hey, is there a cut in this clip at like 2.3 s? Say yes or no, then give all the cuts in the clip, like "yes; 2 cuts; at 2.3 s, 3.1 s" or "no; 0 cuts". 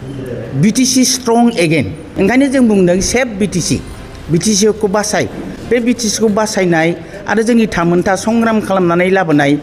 yes; 1 cut; at 2.3 s